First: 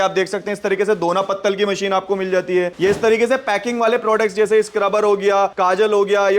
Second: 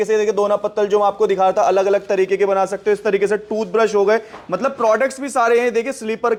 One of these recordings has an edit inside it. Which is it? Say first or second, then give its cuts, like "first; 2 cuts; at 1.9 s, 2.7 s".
first; 2 cuts; at 2.7 s, 5.5 s